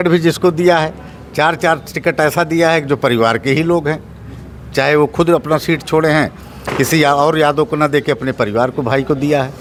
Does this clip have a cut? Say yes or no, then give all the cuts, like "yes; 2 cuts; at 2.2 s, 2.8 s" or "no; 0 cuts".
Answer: no; 0 cuts